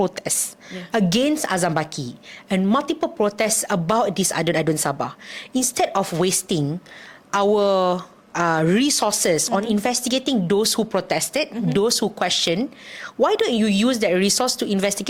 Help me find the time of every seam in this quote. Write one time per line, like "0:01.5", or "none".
none